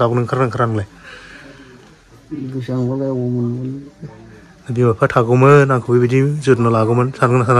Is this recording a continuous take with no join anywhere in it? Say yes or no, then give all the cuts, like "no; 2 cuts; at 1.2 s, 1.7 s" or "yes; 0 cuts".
yes; 0 cuts